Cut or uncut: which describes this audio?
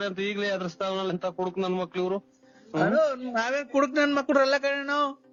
uncut